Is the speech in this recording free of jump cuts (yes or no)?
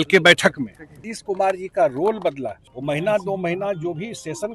no